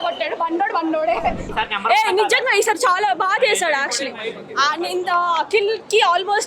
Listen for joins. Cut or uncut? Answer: cut